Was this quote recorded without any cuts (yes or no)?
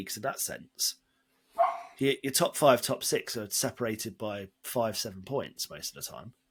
yes